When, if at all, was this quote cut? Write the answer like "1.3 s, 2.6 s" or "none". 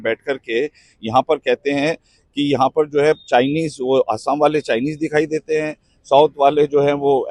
none